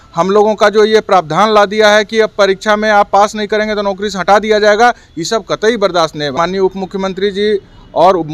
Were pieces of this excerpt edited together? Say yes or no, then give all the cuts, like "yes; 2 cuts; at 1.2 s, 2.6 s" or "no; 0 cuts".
yes; 1 cut; at 6.3 s